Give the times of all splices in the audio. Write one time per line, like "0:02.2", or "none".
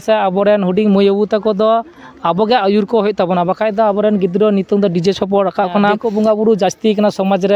0:06.0